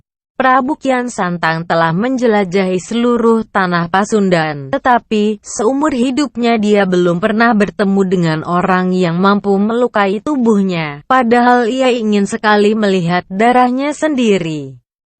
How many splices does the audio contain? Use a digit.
1